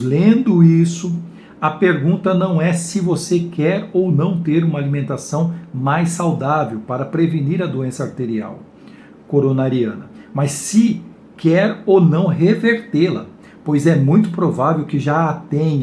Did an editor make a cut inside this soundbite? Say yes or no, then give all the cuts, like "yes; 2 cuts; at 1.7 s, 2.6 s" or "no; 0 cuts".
no; 0 cuts